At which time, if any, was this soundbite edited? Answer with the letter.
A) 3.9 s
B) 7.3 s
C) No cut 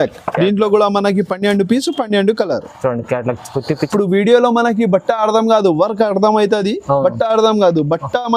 A